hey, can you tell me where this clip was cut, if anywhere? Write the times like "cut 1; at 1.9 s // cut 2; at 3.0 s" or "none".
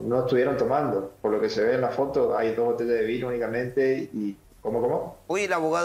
cut 1; at 4.5 s